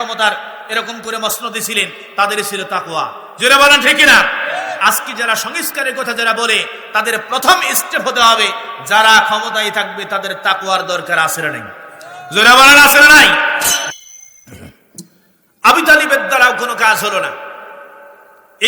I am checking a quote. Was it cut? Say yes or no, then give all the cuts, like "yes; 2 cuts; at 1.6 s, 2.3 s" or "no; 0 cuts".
yes; 1 cut; at 13.9 s